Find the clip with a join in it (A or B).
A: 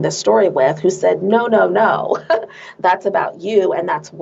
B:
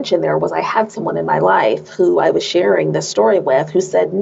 A